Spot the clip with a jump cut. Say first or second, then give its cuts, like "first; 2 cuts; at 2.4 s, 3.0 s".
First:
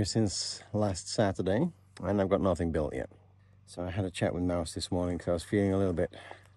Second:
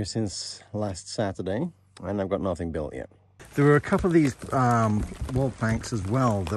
second; 1 cut; at 3.3 s